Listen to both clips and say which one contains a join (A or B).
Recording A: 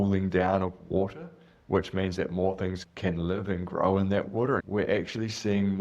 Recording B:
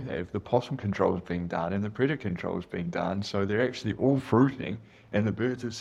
A